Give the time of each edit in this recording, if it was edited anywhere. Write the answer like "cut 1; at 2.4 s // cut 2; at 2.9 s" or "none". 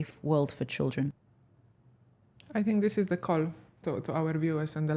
cut 1; at 1.1 s